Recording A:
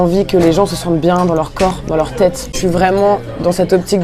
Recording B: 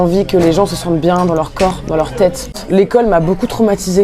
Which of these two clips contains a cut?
B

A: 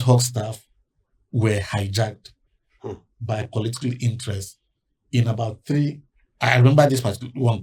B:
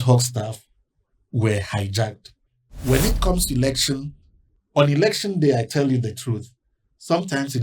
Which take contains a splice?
B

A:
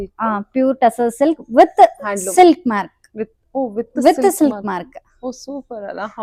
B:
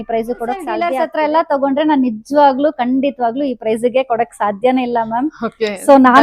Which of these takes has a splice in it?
B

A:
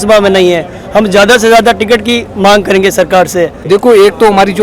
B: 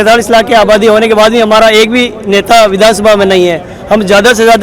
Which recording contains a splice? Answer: A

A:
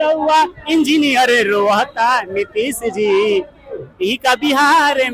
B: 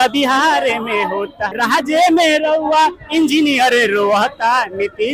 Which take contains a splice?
B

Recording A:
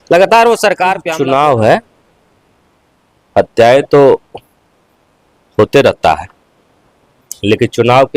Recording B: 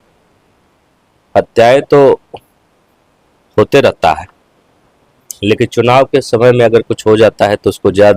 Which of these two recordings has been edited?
A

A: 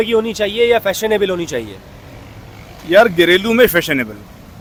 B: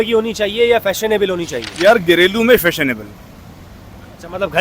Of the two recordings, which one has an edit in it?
B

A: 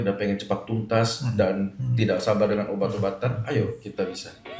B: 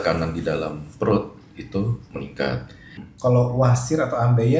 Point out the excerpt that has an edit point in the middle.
B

